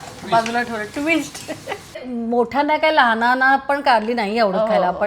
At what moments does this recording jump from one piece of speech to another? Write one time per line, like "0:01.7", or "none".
0:02.1

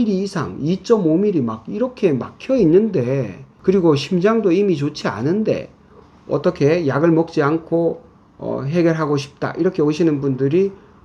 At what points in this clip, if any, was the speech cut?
none

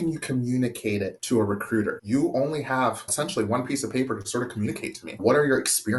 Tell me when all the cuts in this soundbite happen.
0:01.2
0:02.0
0:03.1
0:05.2

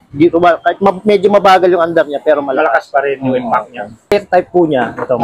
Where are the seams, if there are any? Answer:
0:04.1

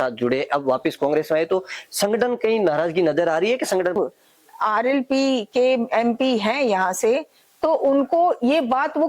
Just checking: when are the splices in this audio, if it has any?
0:04.0

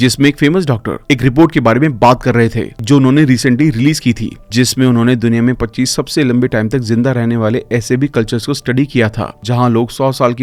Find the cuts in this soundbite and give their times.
none

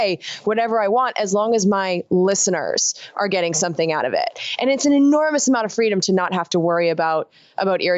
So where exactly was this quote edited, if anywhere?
none

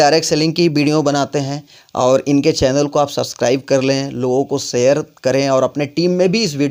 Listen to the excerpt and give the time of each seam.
none

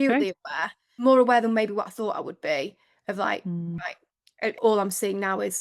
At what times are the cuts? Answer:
0:01.0
0:04.4

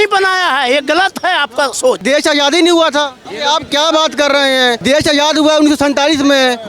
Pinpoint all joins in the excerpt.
0:02.0
0:03.2
0:04.8

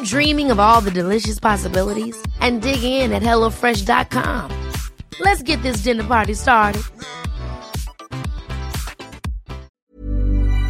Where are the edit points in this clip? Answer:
0:09.7

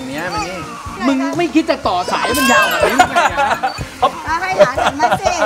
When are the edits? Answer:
0:00.9
0:04.1

